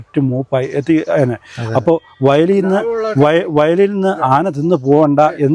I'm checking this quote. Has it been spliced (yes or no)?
no